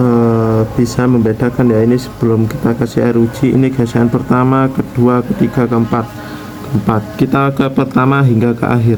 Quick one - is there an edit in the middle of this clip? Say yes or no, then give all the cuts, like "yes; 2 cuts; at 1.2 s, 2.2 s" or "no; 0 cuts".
no; 0 cuts